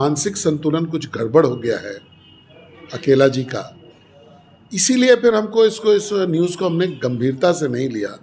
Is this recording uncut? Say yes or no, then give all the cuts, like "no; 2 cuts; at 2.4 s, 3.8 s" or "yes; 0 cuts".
yes; 0 cuts